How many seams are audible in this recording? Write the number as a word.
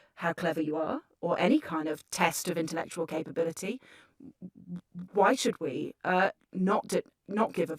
one